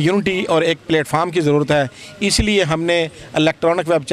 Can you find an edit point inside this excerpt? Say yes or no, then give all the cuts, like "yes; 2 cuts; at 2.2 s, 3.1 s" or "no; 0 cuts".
no; 0 cuts